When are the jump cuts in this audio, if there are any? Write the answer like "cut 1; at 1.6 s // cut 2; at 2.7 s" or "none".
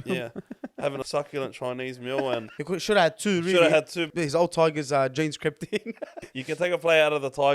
cut 1; at 1.0 s // cut 2; at 2.5 s // cut 3; at 4.1 s // cut 4; at 6.3 s